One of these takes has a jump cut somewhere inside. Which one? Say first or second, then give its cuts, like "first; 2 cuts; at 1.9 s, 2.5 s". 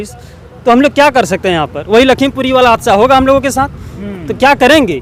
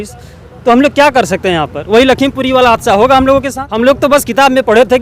second; 1 cut; at 3.6 s